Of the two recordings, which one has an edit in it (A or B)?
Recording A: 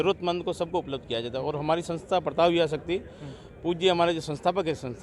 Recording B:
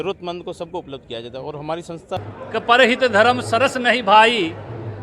B